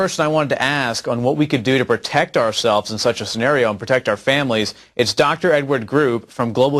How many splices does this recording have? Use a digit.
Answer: 1